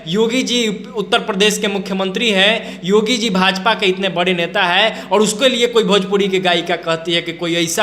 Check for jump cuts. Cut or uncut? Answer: uncut